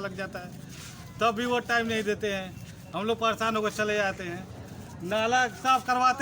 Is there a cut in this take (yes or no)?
no